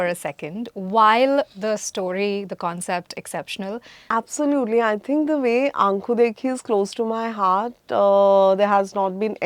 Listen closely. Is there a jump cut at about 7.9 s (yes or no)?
no